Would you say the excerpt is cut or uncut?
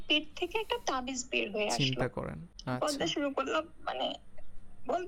cut